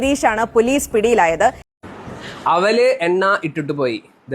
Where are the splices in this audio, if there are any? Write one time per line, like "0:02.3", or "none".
0:01.7